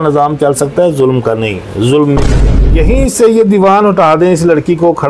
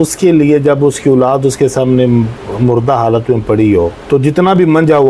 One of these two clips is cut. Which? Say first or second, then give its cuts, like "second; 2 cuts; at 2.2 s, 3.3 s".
first; 1 cut; at 2.5 s